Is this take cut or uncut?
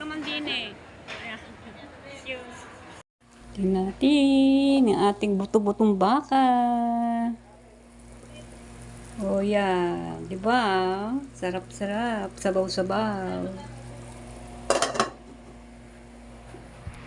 cut